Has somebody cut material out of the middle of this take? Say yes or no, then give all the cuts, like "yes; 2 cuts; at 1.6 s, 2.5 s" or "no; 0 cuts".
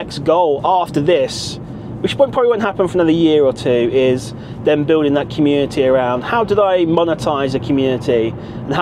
no; 0 cuts